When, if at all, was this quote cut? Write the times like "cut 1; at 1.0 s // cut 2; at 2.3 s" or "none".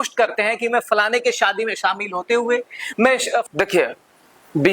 cut 1; at 3.4 s